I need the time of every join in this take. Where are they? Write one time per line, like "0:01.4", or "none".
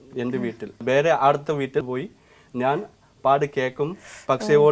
0:00.8
0:01.8